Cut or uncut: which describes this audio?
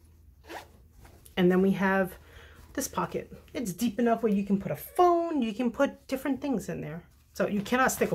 uncut